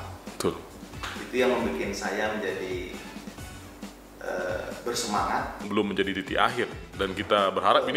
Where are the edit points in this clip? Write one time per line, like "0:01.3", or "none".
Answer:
0:05.7

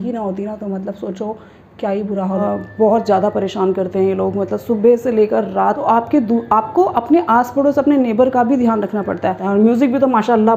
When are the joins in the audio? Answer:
0:02.4
0:05.8
0:09.4

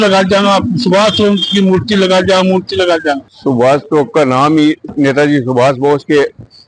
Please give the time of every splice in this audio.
0:03.3

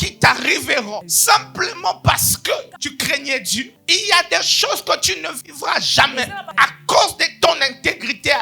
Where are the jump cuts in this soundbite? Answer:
0:01.1
0:02.7
0:03.7
0:06.5

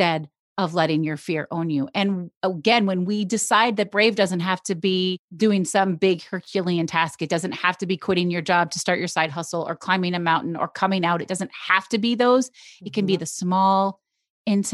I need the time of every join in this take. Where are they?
0:05.2

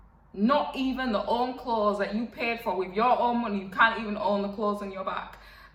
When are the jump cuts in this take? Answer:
none

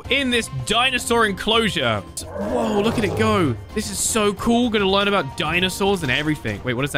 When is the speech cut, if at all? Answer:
0:02.2

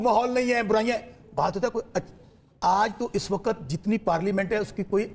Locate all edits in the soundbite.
none

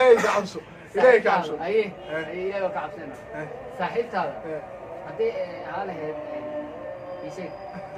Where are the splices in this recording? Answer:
none

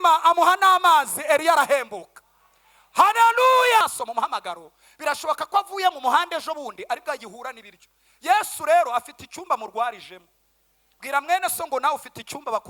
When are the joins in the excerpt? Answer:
0:03.8

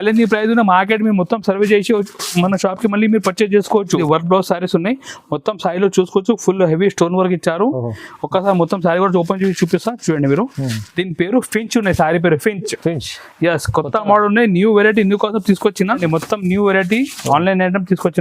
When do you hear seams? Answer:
0:04.0
0:16.0

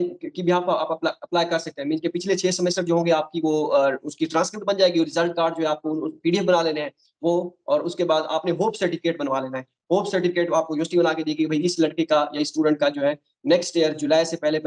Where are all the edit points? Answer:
none

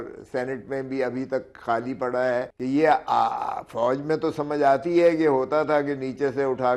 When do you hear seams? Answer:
0:02.5

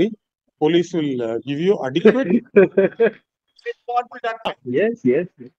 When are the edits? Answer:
0:04.5

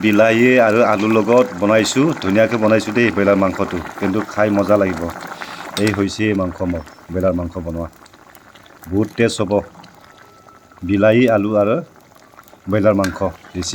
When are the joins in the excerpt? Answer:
none

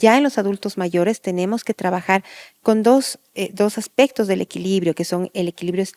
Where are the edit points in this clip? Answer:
none

